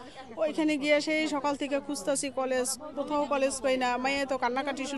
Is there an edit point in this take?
no; 0 cuts

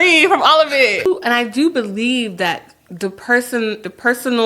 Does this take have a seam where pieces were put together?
yes; 1 cut; at 1.1 s

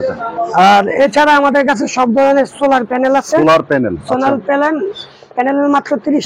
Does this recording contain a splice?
no; 0 cuts

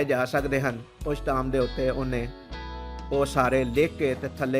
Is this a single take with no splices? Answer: yes; 0 cuts

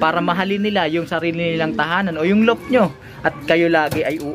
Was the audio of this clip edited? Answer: no; 0 cuts

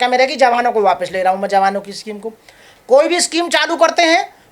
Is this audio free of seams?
yes; 0 cuts

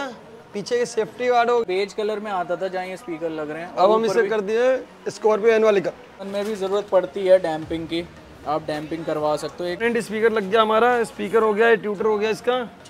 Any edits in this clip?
yes; 3 cuts; at 1.6 s, 6.3 s, 9.8 s

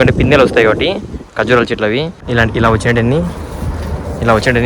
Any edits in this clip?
yes; 1 cut; at 2.3 s

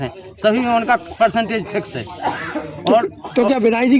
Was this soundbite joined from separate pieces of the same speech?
no; 0 cuts

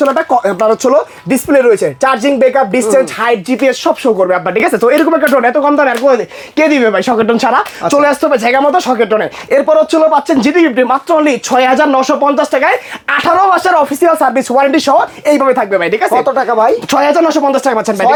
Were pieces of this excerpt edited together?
no; 0 cuts

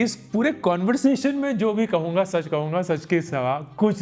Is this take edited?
no; 0 cuts

